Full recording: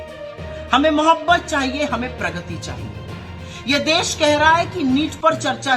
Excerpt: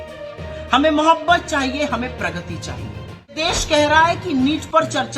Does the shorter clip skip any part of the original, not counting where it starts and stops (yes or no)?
yes